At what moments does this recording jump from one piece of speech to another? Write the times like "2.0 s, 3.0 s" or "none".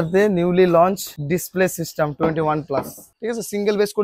1.1 s, 3.0 s